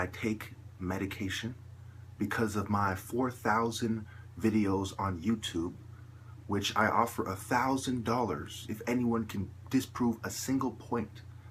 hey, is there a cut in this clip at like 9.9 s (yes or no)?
yes